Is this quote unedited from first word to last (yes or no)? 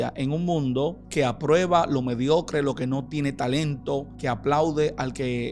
no